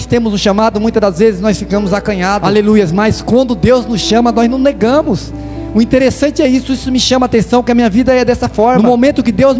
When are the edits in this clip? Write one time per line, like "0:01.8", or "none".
0:02.4
0:08.8